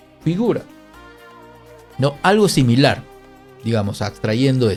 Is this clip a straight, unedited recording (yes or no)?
yes